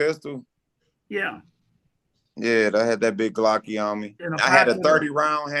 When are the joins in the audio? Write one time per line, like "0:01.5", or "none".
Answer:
0:04.2